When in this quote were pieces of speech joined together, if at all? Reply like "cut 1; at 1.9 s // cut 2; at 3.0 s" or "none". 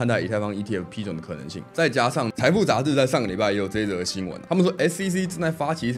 cut 1; at 1.6 s // cut 2; at 2.3 s